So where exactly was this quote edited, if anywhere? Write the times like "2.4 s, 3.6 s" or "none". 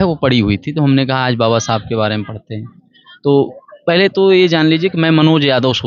none